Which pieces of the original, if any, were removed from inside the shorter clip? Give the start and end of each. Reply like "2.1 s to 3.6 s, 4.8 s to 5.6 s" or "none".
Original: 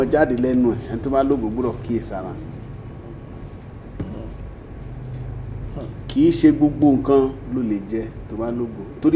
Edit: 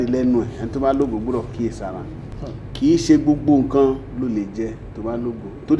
2.6 s to 5.6 s